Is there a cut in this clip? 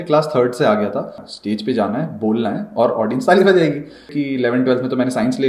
yes; 2 cuts; at 1.2 s, 4.1 s

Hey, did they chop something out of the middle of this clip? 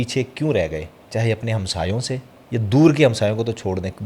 no; 0 cuts

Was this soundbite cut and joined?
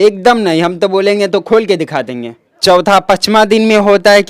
yes; 1 cut; at 2.5 s

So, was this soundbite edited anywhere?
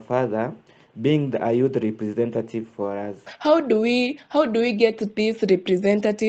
yes; 1 cut; at 3.3 s

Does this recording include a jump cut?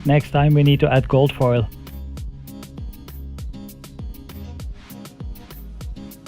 yes; 1 cut; at 2.9 s

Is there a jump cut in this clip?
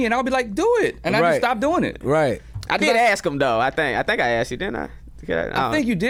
no; 0 cuts

